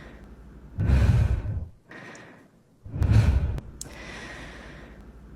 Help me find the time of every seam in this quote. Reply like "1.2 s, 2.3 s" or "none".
3.6 s